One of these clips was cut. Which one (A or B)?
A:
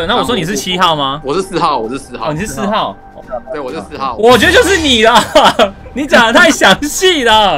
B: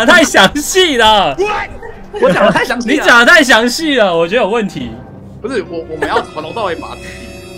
A